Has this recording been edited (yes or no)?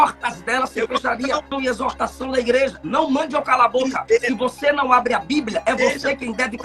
yes